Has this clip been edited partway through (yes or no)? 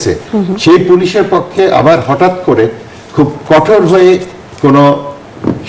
no